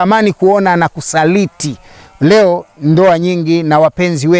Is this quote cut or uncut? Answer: uncut